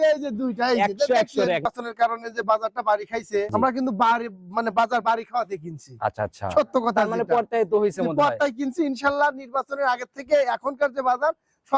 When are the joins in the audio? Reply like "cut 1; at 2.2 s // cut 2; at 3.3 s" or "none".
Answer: cut 1; at 1.7 s // cut 2; at 3.5 s